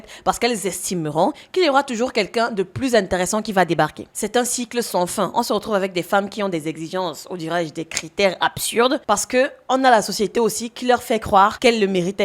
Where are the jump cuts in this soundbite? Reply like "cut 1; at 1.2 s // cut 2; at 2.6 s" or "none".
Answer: cut 1; at 4.2 s